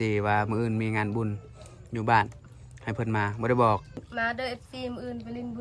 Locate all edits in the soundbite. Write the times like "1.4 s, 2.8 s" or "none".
4.1 s